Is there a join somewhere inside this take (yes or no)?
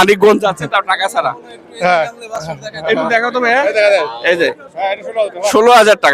no